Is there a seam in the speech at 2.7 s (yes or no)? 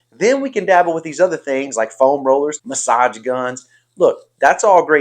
yes